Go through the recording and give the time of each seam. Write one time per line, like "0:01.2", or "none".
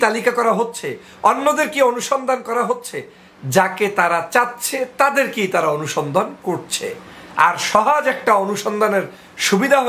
none